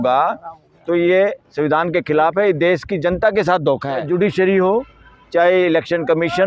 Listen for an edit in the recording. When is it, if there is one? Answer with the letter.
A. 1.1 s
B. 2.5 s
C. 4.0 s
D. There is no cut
C